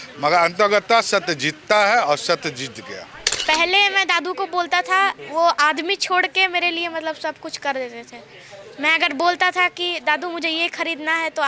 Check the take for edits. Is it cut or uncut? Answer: cut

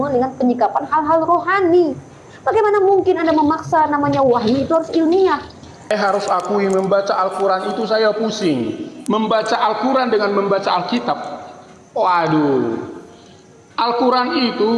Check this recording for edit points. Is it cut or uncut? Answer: cut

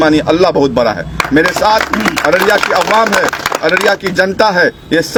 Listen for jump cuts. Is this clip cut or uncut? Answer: uncut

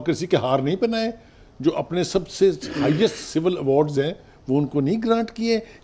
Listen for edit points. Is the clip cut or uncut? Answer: uncut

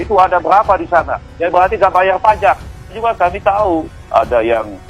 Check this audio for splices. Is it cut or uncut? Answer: cut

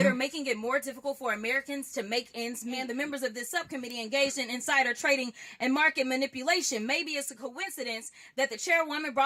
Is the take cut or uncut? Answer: cut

